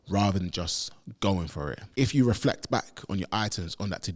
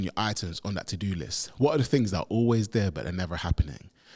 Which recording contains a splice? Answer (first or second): first